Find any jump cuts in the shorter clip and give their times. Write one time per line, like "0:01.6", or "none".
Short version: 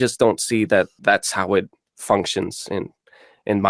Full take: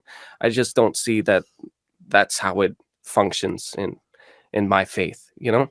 0:00.9